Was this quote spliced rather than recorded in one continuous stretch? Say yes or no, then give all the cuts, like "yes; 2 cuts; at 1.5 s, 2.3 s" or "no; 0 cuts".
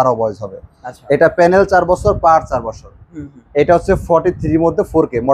no; 0 cuts